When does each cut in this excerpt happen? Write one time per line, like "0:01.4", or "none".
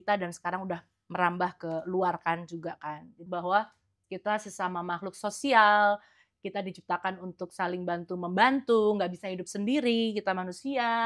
0:03.2